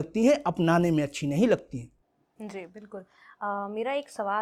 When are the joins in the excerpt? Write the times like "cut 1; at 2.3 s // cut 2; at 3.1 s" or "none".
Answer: none